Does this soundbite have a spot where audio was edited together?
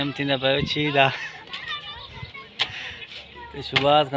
no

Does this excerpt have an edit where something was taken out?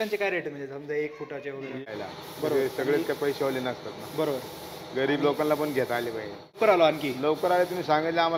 yes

